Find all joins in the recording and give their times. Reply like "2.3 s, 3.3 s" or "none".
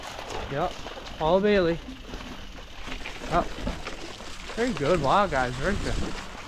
none